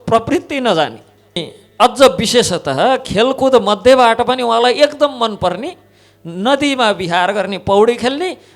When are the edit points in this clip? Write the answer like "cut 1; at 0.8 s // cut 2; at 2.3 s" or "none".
cut 1; at 1.6 s